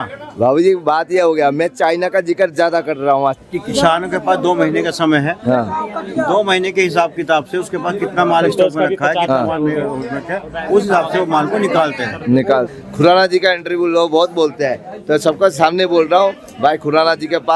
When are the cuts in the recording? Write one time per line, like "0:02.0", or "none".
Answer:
0:03.4
0:12.7